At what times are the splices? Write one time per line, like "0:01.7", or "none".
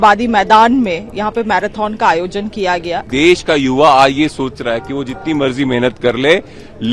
0:03.0